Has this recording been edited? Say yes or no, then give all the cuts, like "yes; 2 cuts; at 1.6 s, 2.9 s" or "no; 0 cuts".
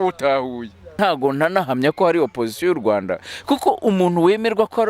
yes; 1 cut; at 1.0 s